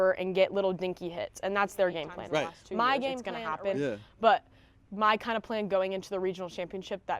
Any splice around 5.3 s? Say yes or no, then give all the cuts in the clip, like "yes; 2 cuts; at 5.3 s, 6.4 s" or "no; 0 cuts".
no; 1 cut; at 3.3 s